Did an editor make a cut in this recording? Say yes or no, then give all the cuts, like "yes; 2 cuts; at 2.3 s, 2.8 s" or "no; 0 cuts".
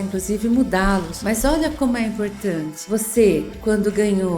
yes; 1 cut; at 1.1 s